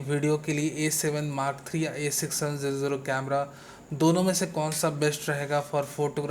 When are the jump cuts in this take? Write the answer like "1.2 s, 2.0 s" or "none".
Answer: none